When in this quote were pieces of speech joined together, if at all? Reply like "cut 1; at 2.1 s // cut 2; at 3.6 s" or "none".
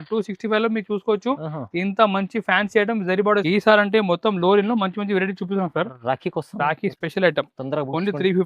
cut 1; at 3.4 s